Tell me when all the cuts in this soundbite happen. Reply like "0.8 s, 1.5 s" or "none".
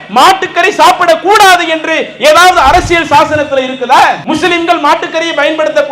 4.2 s